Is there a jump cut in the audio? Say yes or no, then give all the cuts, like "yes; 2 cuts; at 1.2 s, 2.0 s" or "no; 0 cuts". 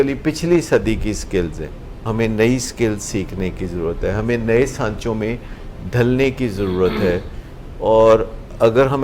yes; 1 cut; at 2.1 s